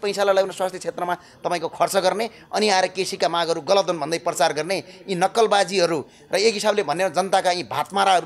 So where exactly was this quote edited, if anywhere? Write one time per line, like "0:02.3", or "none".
none

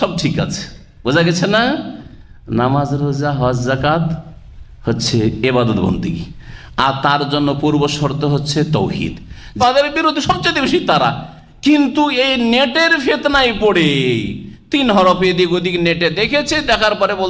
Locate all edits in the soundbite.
0:09.6

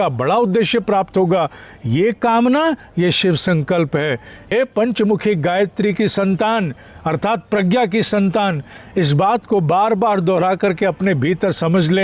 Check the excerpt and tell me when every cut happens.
0:04.3

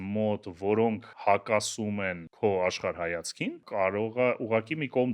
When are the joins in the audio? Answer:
0:01.1
0:02.2
0:03.6

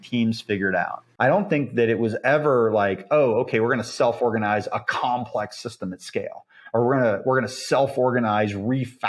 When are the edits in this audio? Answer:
0:01.0

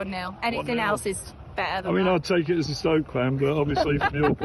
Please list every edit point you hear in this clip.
none

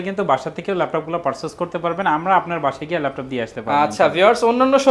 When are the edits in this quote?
none

